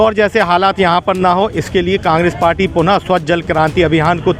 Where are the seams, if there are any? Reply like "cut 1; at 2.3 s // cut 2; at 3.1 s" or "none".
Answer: none